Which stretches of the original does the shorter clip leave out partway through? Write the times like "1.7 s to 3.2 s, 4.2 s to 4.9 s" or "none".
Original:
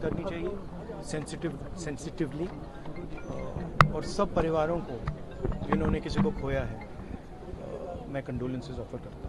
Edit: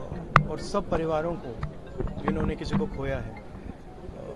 none